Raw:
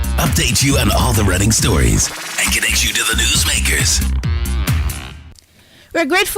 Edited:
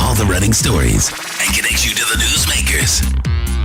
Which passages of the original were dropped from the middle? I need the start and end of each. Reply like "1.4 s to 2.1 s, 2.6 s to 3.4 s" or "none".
none

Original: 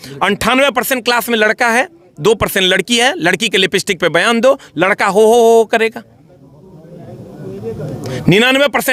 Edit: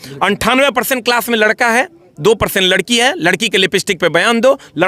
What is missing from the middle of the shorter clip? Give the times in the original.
none

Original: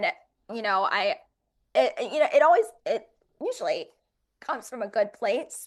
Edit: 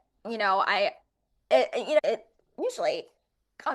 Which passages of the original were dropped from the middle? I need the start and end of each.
2.3 s to 2.8 s

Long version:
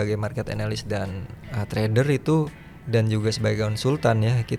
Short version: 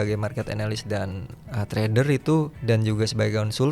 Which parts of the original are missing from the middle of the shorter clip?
2.5 s to 2.8 s

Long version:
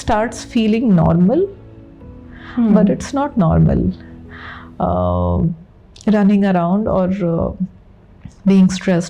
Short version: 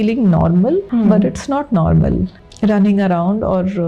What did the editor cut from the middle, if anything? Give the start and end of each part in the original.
1.5 s to 2.5 s, 4.1 s to 5.9 s

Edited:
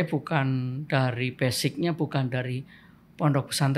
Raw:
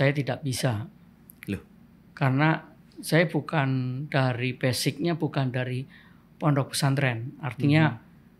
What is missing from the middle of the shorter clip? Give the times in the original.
none

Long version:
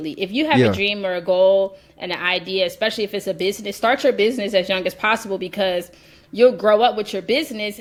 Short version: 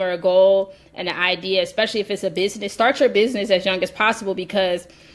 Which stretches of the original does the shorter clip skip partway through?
none

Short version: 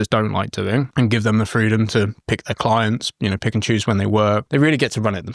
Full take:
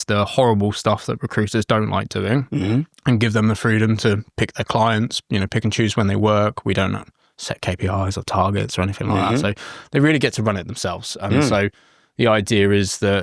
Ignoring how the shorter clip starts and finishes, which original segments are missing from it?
2.5 s to 3.0 s, 6.6 s to 9.9 s

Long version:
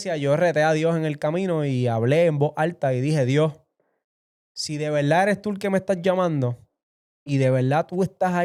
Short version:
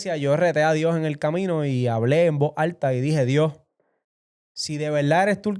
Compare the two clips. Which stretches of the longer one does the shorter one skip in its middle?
none

